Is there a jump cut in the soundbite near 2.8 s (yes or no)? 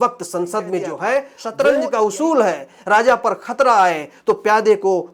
no